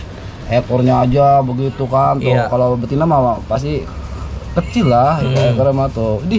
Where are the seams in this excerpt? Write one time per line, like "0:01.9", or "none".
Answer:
none

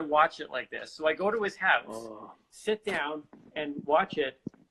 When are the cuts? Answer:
none

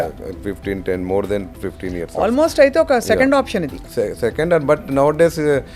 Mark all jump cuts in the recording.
none

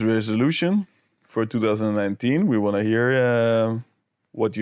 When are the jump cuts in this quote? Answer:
none

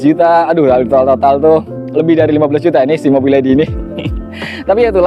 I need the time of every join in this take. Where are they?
none

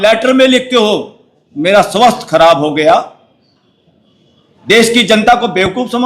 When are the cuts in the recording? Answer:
none

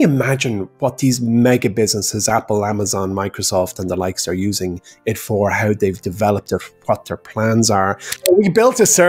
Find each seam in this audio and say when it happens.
0:08.1

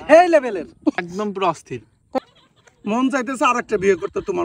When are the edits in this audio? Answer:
0:01.0
0:02.2

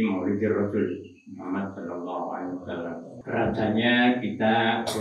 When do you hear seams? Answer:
0:03.2

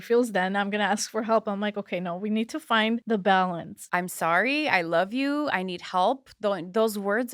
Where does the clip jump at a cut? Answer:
0:03.0
0:03.7

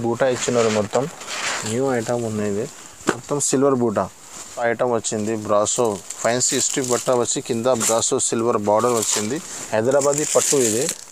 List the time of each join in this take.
0:04.5

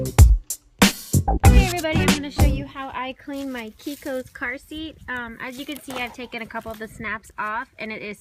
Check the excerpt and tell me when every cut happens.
0:01.4

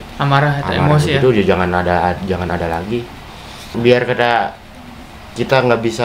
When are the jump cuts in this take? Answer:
0:03.7

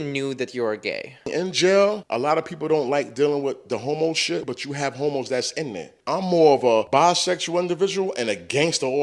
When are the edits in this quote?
0:01.3
0:02.1
0:04.4
0:05.9
0:06.9

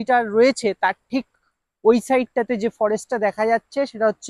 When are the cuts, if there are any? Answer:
none

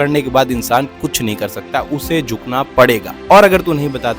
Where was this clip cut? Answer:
0:03.2

